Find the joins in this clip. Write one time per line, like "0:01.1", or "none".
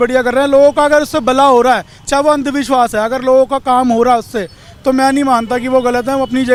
none